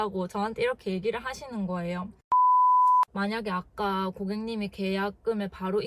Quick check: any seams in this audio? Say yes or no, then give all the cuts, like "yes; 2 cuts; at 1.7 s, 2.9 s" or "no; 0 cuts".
yes; 1 cut; at 3.1 s